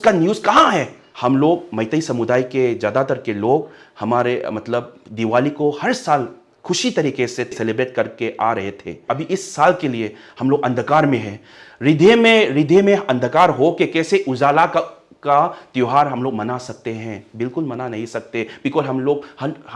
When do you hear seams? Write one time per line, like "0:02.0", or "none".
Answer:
0:01.0
0:07.5
0:09.0